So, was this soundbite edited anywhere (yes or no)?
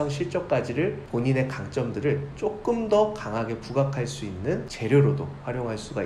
yes